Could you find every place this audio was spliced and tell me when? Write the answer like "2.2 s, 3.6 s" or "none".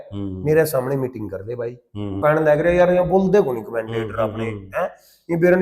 2.2 s